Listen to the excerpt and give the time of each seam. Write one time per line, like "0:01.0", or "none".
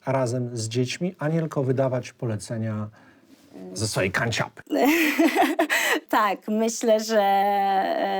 0:06.0